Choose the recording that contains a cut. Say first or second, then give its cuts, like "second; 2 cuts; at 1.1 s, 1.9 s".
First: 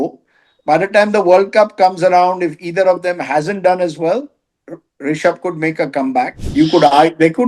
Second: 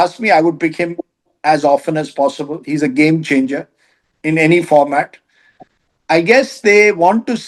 first; 1 cut; at 6.4 s